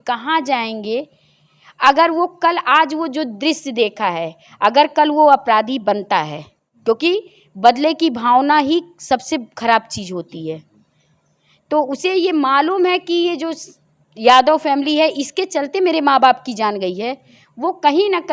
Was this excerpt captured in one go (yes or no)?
yes